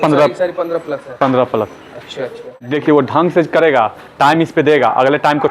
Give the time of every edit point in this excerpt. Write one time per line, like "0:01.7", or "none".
0:02.6